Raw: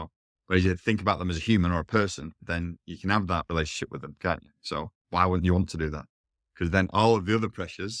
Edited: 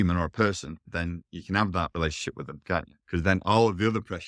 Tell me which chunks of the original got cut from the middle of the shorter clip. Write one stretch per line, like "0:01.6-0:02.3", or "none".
0:04.5-0:06.4